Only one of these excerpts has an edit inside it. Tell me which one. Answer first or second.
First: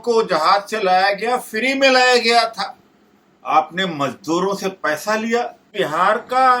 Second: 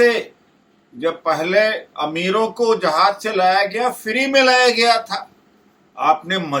first